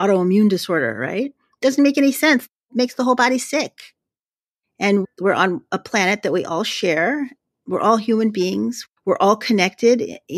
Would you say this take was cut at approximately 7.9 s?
no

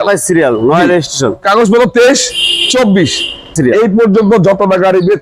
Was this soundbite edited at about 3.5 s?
yes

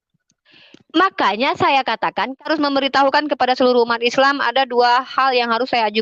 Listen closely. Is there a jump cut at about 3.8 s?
no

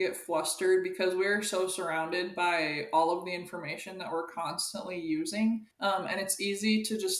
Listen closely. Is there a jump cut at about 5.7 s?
yes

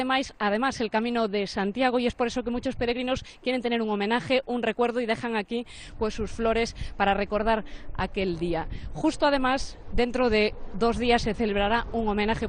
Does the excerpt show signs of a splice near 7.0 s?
no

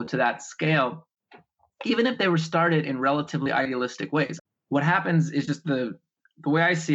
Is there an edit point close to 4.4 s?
yes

